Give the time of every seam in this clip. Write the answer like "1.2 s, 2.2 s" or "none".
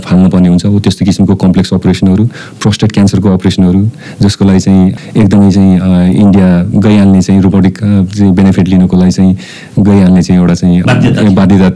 5.0 s, 6.7 s, 10.8 s